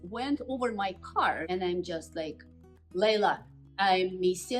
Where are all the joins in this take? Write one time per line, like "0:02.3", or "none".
0:01.4